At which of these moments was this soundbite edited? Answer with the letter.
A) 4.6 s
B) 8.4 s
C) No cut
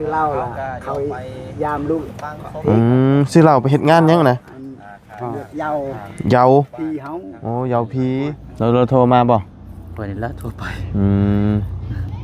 B